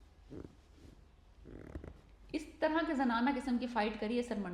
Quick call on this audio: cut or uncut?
uncut